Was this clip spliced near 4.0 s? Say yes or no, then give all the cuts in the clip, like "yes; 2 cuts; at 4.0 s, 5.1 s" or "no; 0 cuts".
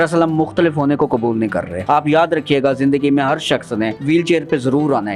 yes; 2 cuts; at 1.7 s, 4.0 s